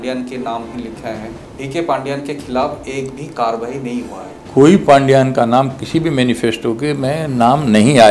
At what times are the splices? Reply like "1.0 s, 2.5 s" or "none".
none